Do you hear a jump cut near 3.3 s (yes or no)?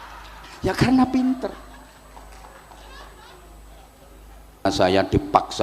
no